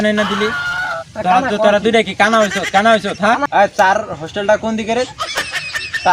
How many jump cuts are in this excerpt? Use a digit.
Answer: 1